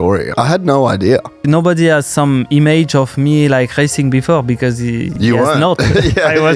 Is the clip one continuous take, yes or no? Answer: no